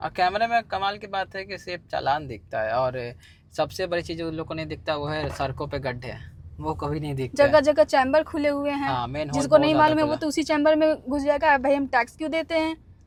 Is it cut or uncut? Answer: uncut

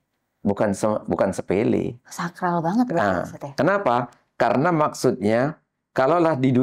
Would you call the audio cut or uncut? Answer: uncut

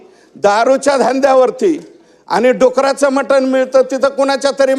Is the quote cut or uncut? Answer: uncut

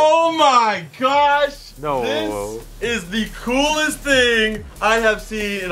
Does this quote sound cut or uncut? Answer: cut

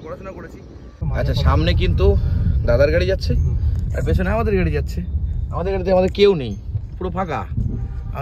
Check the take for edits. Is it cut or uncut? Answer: cut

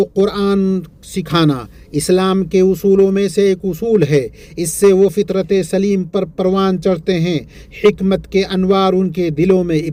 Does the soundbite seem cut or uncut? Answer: uncut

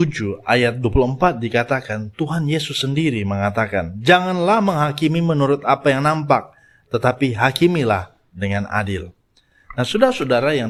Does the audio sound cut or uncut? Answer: uncut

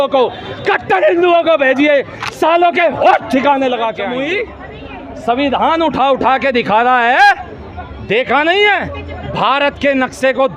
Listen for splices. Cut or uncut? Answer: cut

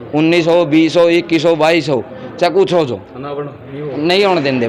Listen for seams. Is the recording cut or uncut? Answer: uncut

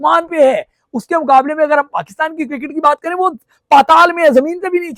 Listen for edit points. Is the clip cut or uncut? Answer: uncut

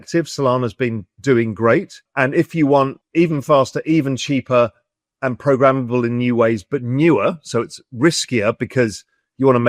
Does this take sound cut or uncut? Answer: cut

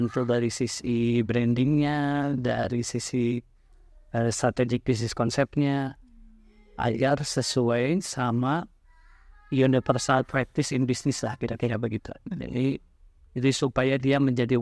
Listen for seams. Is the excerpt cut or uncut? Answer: uncut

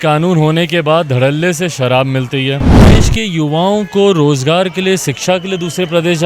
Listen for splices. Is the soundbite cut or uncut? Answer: cut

